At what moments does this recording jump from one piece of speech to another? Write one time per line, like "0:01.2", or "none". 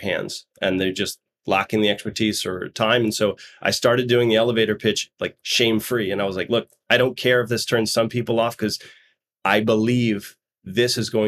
none